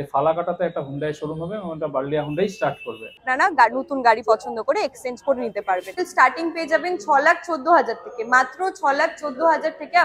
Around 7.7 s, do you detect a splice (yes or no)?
no